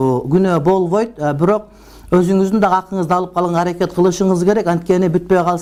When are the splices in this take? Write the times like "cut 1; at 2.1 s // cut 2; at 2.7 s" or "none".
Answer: none